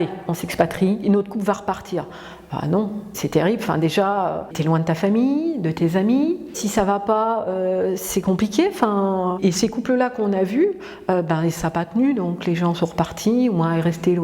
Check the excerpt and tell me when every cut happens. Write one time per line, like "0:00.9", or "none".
0:01.0
0:03.1
0:04.5
0:06.6
0:09.4